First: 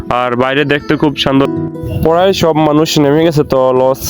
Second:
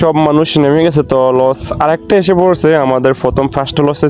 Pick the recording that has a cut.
first; 1 cut; at 1.5 s

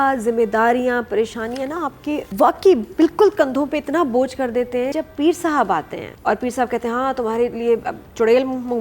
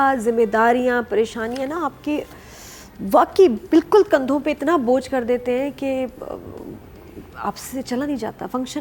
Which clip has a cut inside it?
first; 3 cuts; at 2.3 s, 4.9 s, 6.0 s

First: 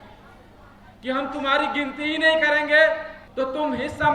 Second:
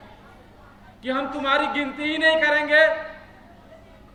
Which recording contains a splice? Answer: first; 1 cut; at 3.2 s

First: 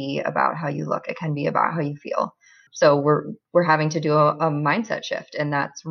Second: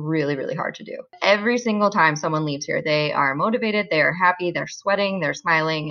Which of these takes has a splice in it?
second; 1 cut; at 1.1 s

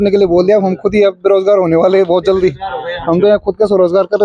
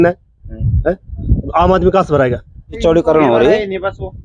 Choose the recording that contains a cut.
second; 1 cut; at 2.8 s

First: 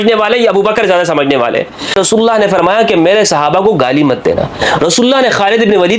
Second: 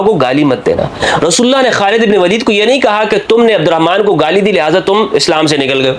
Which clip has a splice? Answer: first; 1 cut; at 2.0 s

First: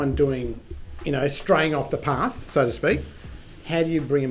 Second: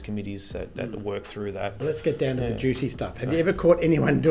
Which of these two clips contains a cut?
second; 1 cut; at 1.8 s

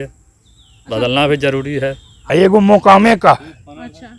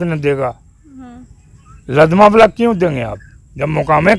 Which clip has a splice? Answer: first; 1 cut; at 2.1 s

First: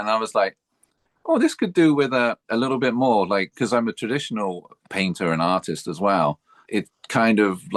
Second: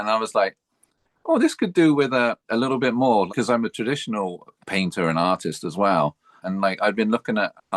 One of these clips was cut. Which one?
second; 2 cuts; at 3.3 s, 6.4 s

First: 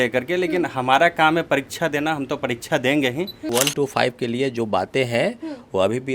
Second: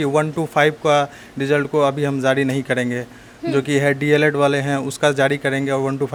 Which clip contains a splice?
first; 1 cut; at 3.5 s

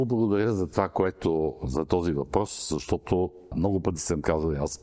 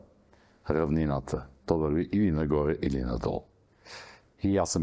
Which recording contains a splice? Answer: first; 1 cut; at 3.5 s

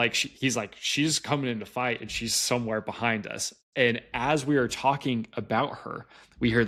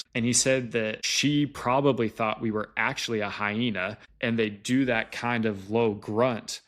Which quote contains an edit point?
second; 2 cuts; at 1.0 s, 4.0 s

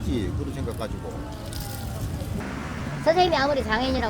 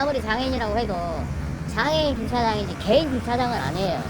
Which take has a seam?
first; 1 cut; at 2.4 s

